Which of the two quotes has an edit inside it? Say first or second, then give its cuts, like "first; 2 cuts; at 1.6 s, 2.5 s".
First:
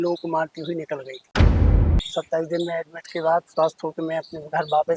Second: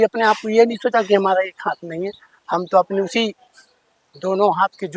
first; 1 cut; at 1.6 s